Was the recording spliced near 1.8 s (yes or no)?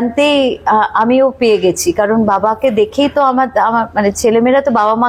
no